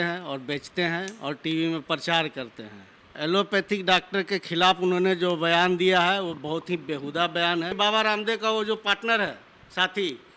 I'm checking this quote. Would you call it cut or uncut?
cut